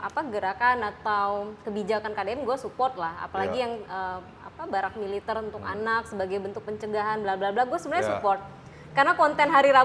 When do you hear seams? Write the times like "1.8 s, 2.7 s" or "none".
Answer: none